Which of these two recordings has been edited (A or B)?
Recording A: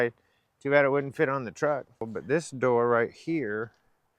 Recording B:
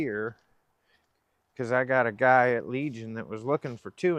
A